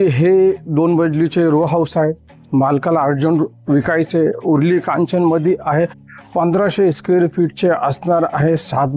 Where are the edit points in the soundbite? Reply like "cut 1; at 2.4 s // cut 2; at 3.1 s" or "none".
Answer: none